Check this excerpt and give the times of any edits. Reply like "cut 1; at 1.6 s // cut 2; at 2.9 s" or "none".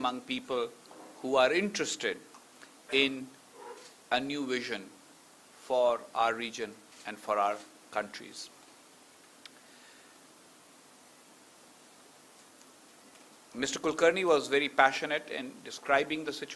none